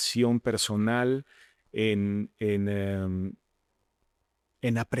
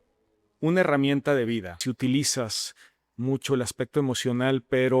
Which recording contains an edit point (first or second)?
second